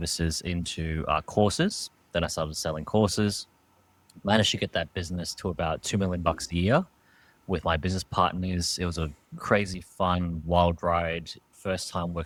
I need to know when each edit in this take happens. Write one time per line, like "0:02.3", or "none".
none

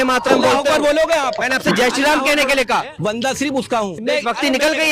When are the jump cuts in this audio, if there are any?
0:01.5
0:02.9
0:03.9

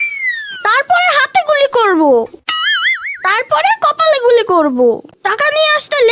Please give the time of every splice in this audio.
0:05.1

